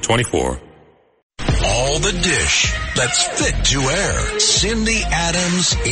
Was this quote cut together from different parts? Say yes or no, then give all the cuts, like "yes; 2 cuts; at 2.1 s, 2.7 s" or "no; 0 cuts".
yes; 1 cut; at 1.1 s